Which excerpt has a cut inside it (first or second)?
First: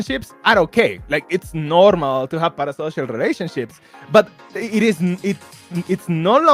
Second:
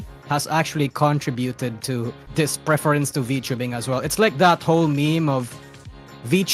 second